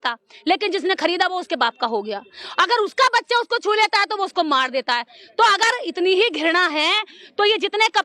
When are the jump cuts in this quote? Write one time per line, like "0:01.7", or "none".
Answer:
none